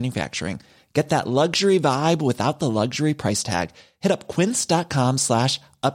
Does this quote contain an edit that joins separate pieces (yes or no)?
no